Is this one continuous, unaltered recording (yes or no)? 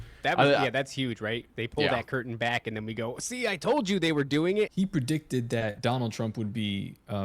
no